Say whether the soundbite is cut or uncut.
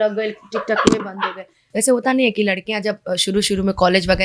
cut